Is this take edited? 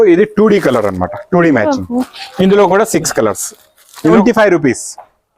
yes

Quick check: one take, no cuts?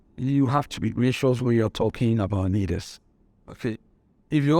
yes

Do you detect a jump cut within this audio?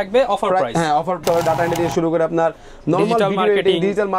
yes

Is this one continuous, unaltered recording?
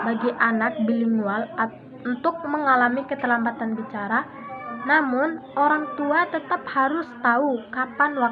yes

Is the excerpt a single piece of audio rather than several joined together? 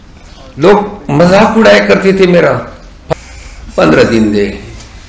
no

